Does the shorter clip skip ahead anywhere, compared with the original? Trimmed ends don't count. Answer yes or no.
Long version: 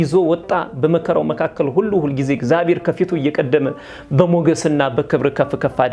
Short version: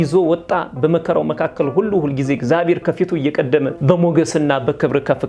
yes